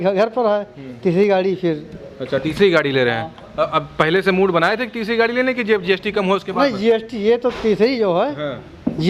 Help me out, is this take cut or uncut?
uncut